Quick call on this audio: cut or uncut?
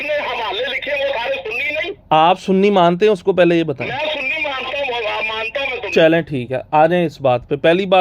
uncut